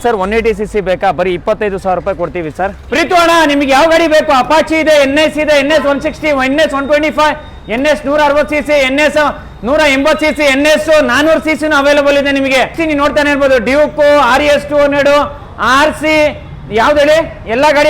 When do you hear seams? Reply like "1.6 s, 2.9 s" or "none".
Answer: 2.8 s, 12.8 s

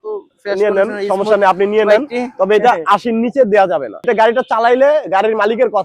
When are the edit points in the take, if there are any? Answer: 3.9 s

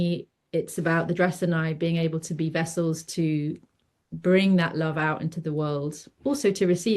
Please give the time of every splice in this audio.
none

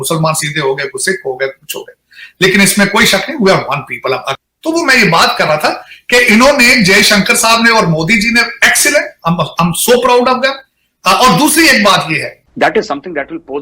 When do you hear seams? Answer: 4.3 s, 12.3 s

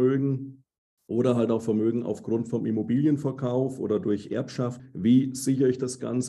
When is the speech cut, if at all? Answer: 4.8 s

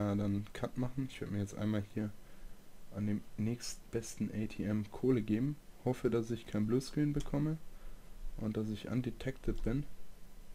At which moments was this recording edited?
none

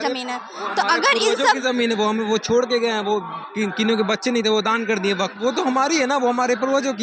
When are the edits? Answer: 5.3 s

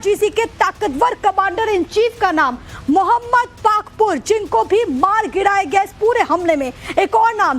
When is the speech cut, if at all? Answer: 2.2 s

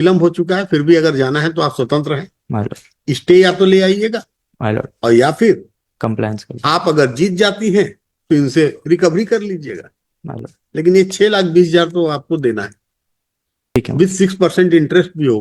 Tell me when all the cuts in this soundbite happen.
13.8 s

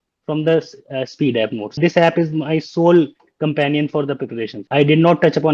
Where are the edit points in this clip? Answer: 1.8 s, 4.6 s

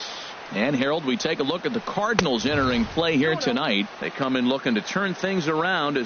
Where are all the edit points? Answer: 3.9 s

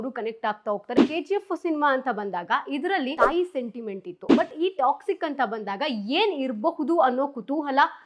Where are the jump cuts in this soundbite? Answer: 1.0 s, 3.1 s

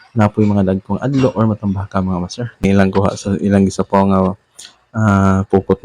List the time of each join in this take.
2.6 s

